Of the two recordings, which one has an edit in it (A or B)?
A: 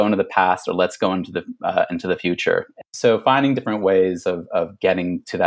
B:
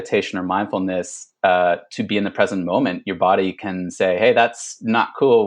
A